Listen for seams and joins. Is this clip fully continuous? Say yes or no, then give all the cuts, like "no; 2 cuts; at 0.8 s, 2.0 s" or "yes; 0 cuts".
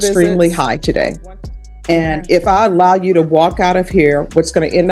yes; 0 cuts